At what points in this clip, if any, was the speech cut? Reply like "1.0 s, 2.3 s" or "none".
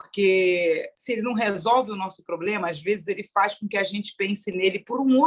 0.9 s